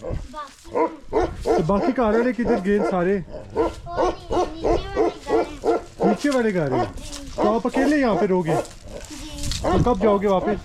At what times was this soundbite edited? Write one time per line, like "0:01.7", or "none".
none